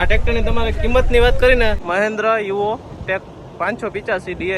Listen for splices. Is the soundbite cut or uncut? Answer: cut